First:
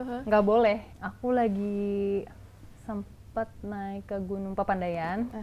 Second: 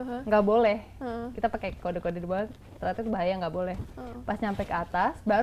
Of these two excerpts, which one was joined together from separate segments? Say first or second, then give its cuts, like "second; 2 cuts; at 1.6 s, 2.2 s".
first; 1 cut; at 0.9 s